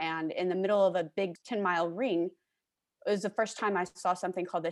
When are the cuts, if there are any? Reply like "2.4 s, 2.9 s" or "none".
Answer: 1.4 s

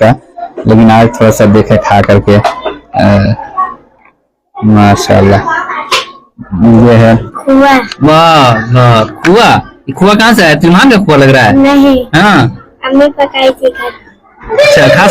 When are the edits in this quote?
7.3 s

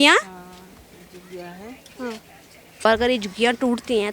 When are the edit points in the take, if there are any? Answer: 2.8 s

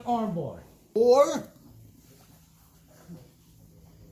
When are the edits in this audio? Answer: 1.0 s

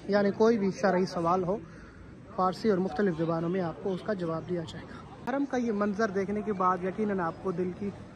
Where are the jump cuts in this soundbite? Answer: 5.2 s

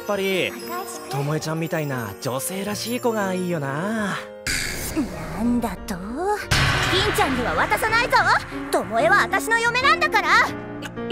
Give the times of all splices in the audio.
4.7 s

